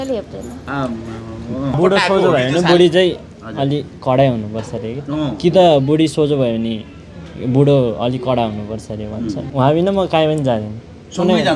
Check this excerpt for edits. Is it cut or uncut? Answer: cut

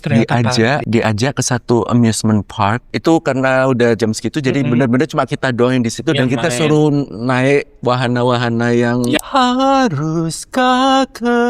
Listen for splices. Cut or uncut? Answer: cut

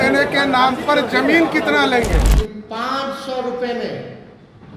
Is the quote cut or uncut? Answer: cut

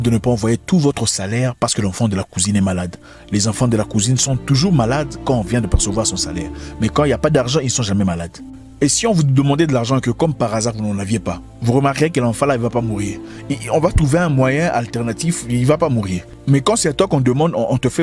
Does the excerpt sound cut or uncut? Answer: uncut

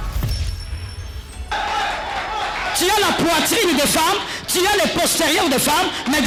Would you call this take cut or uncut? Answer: uncut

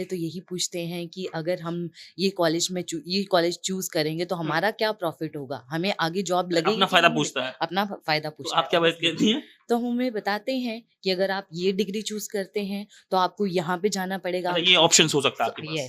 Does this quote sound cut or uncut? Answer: uncut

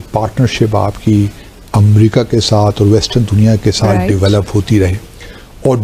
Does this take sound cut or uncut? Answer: uncut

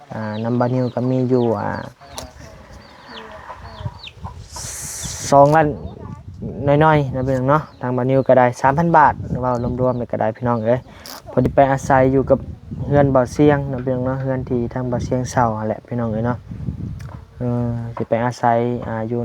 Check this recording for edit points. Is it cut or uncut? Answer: cut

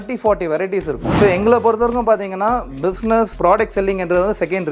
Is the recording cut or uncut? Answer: cut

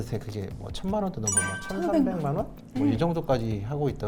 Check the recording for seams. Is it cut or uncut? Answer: uncut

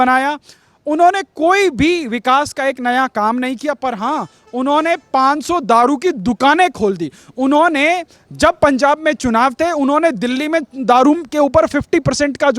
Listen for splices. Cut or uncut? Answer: uncut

